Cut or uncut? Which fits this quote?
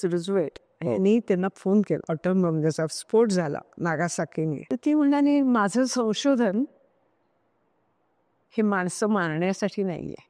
cut